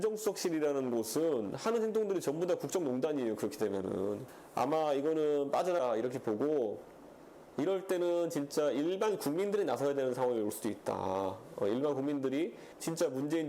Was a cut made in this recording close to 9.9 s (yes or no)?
no